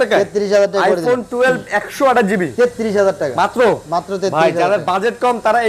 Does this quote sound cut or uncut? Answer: uncut